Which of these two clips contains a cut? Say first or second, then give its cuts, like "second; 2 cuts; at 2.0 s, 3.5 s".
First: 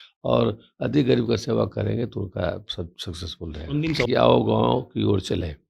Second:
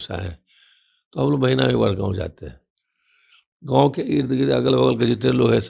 first; 1 cut; at 4.0 s